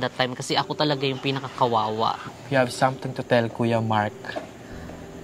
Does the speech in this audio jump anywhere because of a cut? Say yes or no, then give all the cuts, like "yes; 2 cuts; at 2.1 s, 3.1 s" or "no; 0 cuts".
yes; 1 cut; at 2.2 s